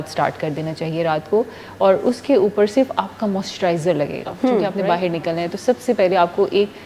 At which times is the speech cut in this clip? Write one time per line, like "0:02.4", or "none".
0:04.7